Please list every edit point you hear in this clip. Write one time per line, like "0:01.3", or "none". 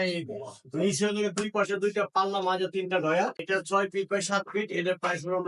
0:03.4